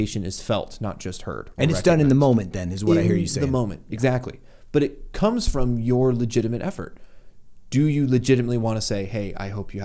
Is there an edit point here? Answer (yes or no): no